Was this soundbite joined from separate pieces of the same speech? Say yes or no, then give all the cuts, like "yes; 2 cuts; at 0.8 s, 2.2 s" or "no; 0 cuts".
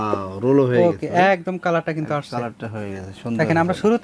no; 0 cuts